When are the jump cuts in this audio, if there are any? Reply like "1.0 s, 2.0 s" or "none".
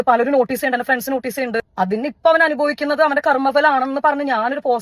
1.7 s